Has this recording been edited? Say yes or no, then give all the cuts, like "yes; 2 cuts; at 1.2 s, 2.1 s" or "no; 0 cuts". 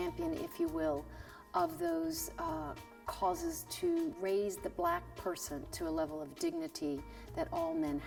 no; 0 cuts